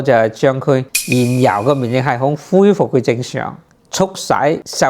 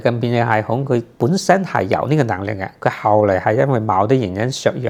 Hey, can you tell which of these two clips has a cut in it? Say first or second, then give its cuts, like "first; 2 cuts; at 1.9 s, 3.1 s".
first; 2 cuts; at 0.9 s, 3.8 s